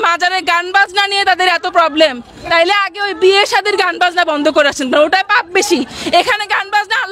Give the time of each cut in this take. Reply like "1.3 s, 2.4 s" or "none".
none